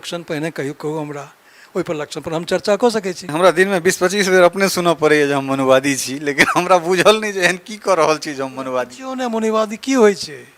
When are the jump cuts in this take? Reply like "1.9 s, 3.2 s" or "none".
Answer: 3.2 s